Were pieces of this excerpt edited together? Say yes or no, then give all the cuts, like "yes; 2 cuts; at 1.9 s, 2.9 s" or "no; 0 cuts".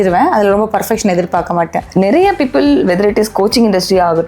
yes; 1 cut; at 1.8 s